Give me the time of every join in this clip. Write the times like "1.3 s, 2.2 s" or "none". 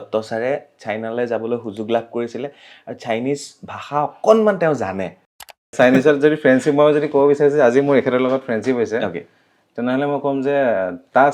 5.7 s